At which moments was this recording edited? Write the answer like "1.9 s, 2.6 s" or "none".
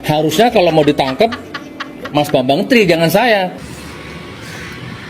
3.6 s

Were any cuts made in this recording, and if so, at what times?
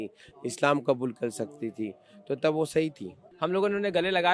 3.2 s

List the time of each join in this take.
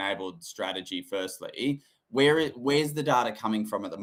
none

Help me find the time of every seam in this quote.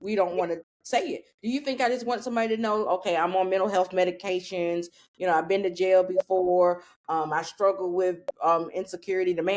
none

